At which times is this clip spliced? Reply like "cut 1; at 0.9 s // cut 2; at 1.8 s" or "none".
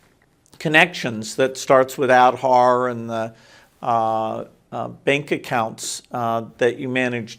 none